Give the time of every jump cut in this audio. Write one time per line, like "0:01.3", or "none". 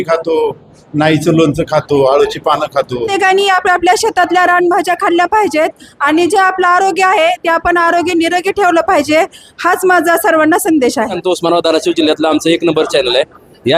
0:03.1
0:11.2